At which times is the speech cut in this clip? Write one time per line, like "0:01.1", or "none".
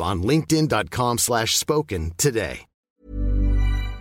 0:02.9